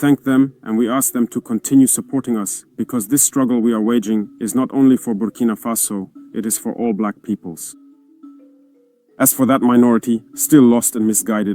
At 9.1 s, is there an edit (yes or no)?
yes